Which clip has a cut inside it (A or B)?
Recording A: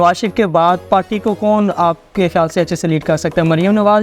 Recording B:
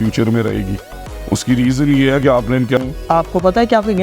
B